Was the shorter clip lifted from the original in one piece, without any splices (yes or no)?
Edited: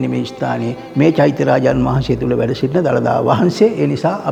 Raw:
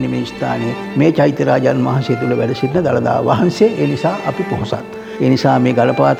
yes